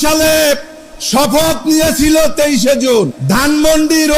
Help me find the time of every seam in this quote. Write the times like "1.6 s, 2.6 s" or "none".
3.2 s